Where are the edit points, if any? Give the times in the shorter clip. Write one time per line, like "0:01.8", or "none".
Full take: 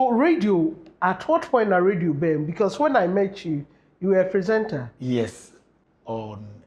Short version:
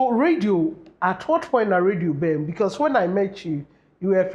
none